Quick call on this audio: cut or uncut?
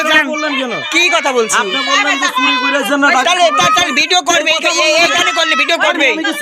uncut